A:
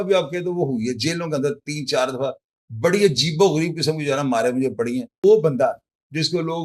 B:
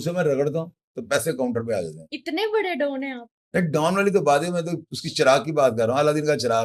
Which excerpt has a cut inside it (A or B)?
A